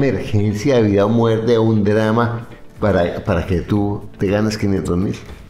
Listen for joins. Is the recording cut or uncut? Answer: uncut